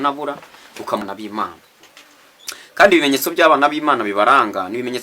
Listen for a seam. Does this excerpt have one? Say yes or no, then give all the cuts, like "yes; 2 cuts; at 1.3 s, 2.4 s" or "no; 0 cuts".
yes; 1 cut; at 1.0 s